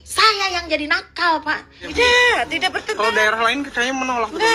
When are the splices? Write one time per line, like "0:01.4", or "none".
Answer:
0:01.8